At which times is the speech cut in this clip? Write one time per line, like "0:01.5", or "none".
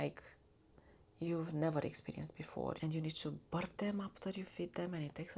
0:02.8